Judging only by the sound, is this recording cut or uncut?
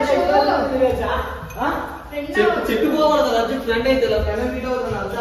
uncut